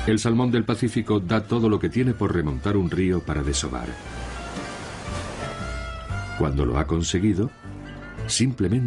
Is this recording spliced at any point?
yes; 1 cut; at 2.2 s

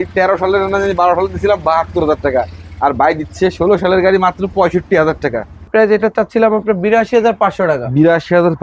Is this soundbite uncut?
no; 1 cut; at 5.6 s

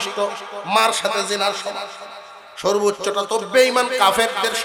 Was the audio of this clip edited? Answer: no; 0 cuts

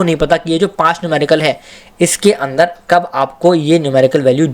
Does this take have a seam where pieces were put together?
no; 0 cuts

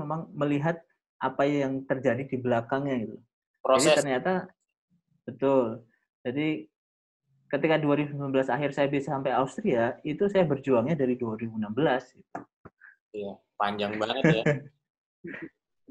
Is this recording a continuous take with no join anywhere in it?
yes; 0 cuts

